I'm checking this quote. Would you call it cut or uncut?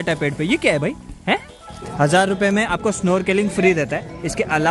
cut